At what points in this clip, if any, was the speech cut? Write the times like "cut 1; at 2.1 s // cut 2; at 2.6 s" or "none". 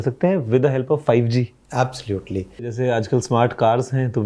cut 1; at 2.7 s